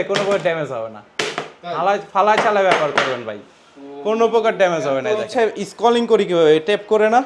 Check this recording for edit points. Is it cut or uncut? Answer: cut